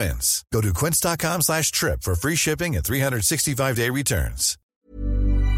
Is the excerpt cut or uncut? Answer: cut